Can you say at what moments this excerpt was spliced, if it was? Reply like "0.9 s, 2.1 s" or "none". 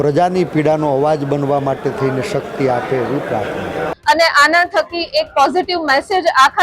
3.9 s